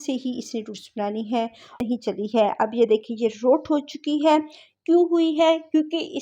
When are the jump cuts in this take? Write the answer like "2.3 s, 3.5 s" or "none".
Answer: 1.8 s